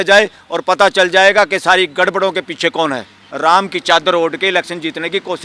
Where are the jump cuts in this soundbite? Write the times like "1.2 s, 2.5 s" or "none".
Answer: 3.2 s